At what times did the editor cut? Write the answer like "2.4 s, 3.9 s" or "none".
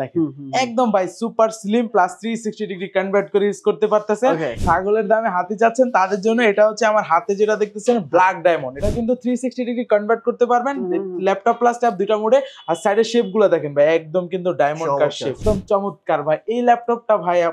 4.6 s, 8.7 s, 15.4 s